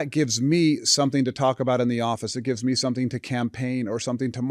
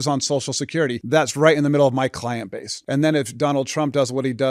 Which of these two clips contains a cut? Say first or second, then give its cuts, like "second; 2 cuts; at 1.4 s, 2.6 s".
second; 2 cuts; at 1.0 s, 2.7 s